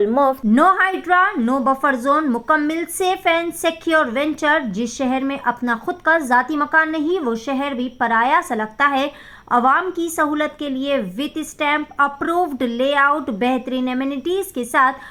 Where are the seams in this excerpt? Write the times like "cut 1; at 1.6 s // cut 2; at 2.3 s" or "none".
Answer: none

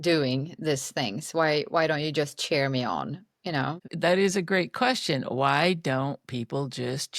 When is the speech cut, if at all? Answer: cut 1; at 3.9 s

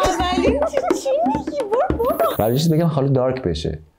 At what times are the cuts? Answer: cut 1; at 2.3 s

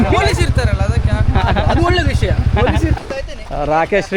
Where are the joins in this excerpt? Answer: cut 1; at 3.0 s

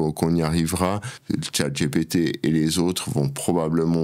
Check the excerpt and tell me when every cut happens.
cut 1; at 1.1 s

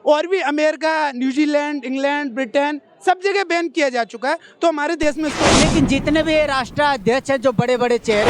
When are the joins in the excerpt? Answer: cut 1; at 5.4 s

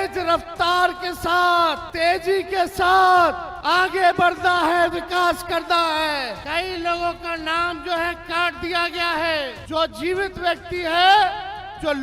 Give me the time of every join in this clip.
cut 1; at 1.8 s // cut 2; at 3.5 s // cut 3; at 6.4 s // cut 4; at 9.6 s

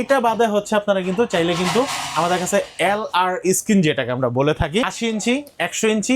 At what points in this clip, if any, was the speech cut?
cut 1; at 4.9 s

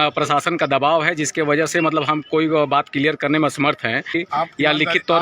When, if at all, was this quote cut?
cut 1; at 4.2 s

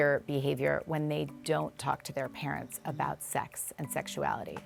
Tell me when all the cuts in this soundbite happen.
none

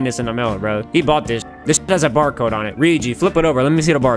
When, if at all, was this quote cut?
cut 1; at 1.5 s

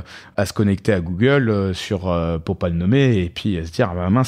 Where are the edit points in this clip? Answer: none

